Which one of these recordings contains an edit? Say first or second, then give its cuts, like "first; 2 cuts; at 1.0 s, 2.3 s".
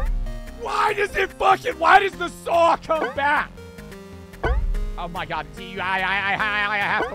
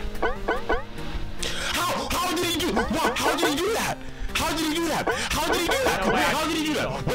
first; 1 cut; at 3.7 s